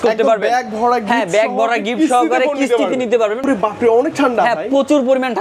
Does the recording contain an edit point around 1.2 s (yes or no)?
no